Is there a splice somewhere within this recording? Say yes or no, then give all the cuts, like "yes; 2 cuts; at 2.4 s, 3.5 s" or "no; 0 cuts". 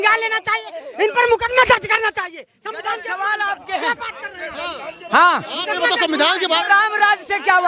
no; 0 cuts